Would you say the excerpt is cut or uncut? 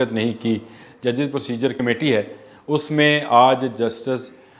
cut